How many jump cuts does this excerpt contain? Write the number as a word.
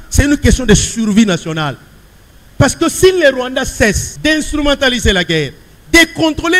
one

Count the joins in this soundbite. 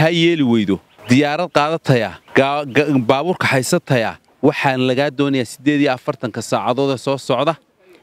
three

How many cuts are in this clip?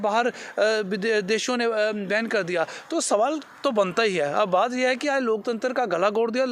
zero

